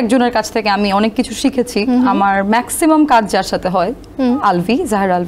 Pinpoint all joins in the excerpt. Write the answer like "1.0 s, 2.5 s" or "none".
none

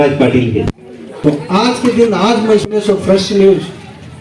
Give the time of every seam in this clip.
1.2 s

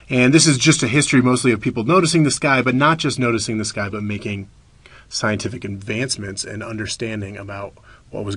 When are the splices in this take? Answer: none

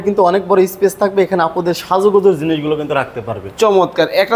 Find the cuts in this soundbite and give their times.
none

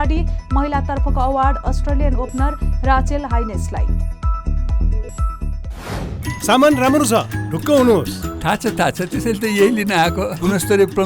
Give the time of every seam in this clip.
6.2 s

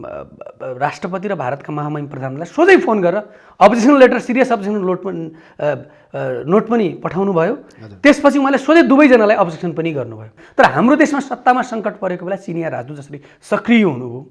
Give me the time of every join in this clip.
10.4 s

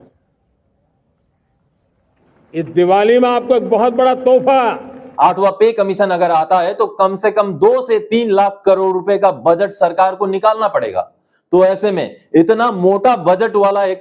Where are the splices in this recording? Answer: 5.0 s

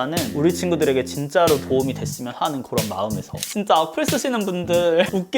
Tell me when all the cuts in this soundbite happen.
3.5 s

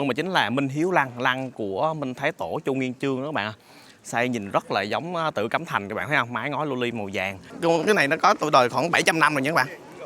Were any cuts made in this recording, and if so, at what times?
7.4 s

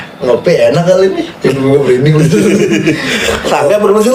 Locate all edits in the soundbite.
none

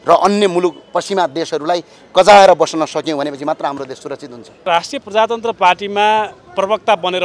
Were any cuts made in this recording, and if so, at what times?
4.6 s

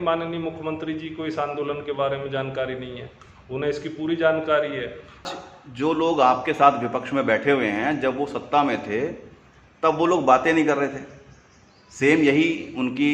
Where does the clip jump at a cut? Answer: 5.3 s

